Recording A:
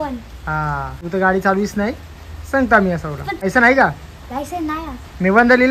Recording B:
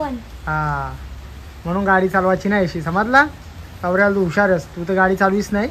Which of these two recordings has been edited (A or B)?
A